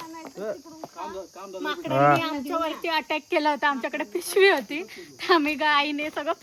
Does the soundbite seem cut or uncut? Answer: uncut